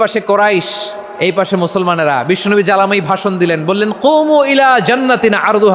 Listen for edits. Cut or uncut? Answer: uncut